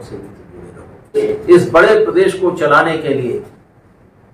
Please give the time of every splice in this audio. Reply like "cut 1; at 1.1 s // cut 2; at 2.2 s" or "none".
cut 1; at 1.2 s

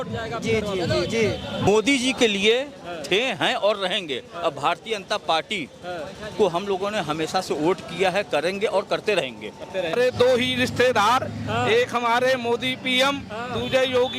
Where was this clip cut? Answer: cut 1; at 1.7 s // cut 2; at 9.9 s

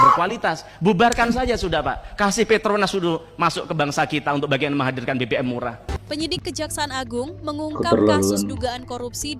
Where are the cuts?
cut 1; at 5.9 s

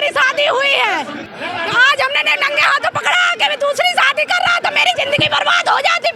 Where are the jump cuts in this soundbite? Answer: cut 1; at 1.2 s

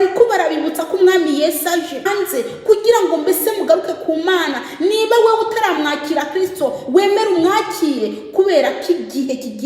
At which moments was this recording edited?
cut 1; at 2.1 s

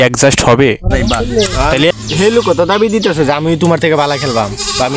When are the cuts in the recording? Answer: cut 1; at 1.9 s

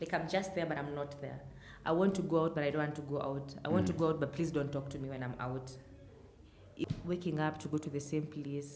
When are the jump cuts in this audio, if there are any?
cut 1; at 6.8 s

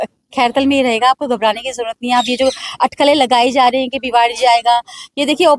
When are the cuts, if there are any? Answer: none

